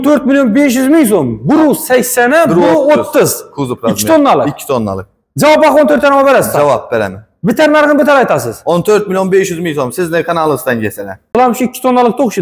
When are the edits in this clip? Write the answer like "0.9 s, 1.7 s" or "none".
11.3 s